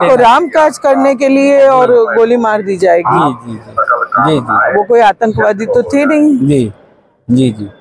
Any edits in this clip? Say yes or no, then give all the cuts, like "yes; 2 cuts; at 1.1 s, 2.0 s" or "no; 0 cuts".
no; 0 cuts